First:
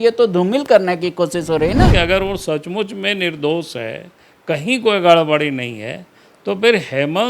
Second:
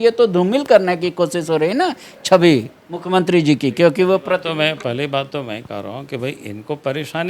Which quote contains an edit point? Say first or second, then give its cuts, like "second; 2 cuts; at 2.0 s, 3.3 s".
first; 1 cut; at 1.9 s